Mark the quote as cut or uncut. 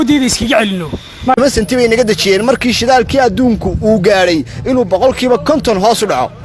cut